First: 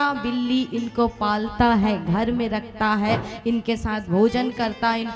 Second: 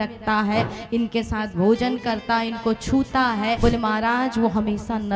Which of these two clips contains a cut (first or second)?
second